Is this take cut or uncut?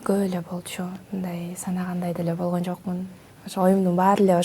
uncut